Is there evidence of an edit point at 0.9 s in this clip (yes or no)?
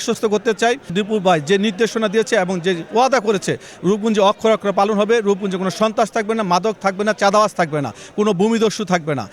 yes